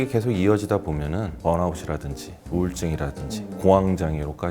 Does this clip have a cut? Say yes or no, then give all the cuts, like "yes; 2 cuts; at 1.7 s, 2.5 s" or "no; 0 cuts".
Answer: yes; 1 cut; at 1.3 s